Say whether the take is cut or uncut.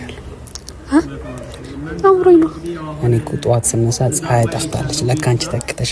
uncut